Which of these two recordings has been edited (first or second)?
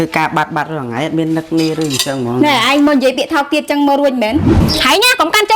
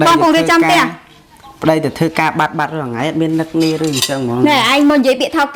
first